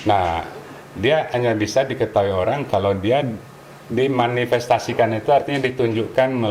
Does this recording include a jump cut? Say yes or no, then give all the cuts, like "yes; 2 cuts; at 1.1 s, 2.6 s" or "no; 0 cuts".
no; 0 cuts